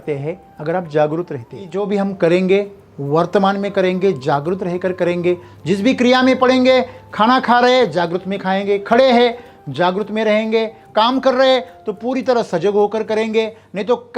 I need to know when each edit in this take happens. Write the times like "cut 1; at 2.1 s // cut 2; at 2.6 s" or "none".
cut 1; at 1.8 s